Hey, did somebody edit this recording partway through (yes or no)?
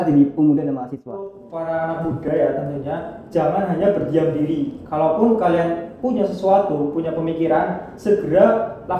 yes